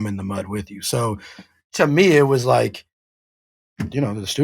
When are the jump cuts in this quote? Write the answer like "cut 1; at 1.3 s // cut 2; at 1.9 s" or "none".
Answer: none